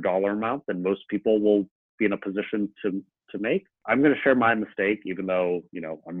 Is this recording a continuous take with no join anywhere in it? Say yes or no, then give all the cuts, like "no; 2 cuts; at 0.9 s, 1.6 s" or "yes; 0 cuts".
no; 1 cut; at 3.8 s